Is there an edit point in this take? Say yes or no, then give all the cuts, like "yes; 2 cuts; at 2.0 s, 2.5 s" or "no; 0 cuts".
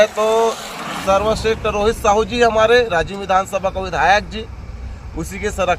no; 0 cuts